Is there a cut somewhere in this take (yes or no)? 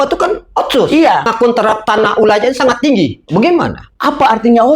yes